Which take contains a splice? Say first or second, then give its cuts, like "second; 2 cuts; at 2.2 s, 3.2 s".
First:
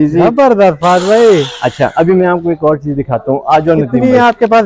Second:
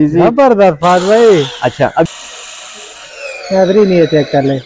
second; 1 cut; at 2.1 s